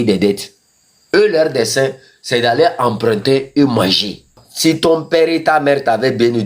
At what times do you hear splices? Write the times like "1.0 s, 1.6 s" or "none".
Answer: 4.5 s